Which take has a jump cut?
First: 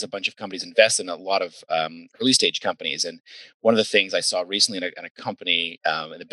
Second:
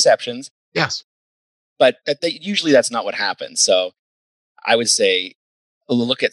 second; 1 cut; at 4.3 s

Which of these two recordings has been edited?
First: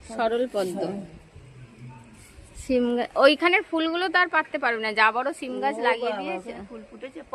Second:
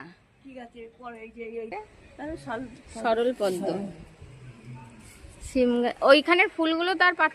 second; 1 cut; at 1.7 s

